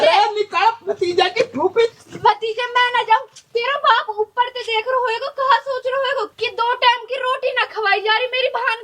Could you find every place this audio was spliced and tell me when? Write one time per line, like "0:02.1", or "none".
0:01.9